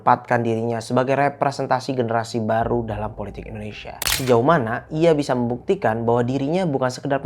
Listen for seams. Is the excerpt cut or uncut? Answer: cut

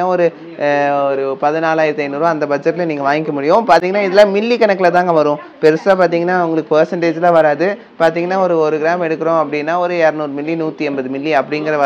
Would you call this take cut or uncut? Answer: uncut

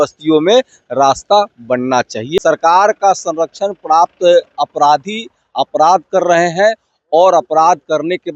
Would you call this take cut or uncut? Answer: cut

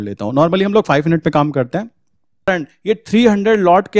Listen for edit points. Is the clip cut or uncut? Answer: cut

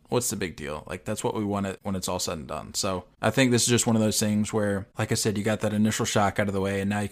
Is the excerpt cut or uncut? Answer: cut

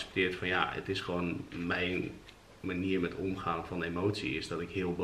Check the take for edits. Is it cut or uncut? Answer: uncut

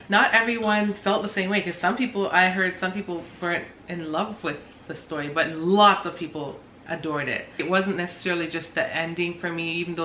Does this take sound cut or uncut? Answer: uncut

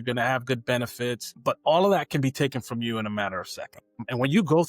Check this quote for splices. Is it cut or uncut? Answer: cut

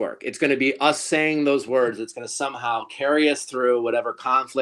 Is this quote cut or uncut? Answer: uncut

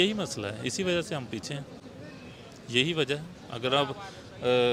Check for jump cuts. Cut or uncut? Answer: uncut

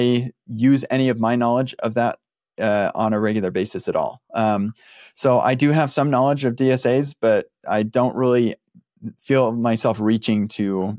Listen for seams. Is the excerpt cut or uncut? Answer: uncut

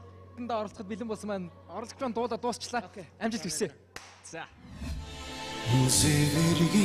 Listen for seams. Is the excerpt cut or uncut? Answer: uncut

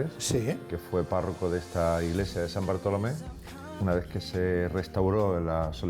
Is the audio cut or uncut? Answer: cut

